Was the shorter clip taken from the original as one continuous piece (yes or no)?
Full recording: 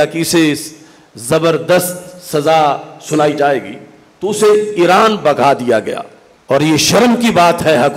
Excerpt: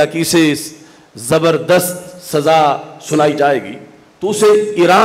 yes